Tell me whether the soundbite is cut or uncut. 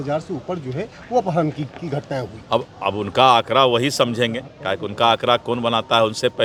uncut